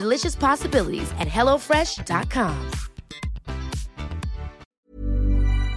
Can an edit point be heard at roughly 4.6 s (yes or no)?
yes